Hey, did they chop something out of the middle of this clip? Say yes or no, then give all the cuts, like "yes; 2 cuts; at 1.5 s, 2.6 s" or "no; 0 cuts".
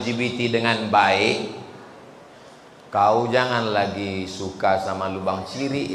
no; 0 cuts